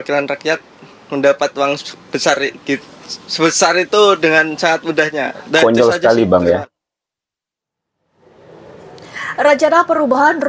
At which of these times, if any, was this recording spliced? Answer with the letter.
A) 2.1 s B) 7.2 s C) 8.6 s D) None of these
D